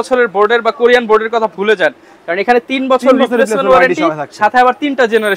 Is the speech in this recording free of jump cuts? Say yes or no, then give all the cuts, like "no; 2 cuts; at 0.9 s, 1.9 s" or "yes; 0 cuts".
yes; 0 cuts